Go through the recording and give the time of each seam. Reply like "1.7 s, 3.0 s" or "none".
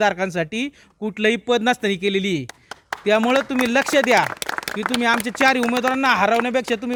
none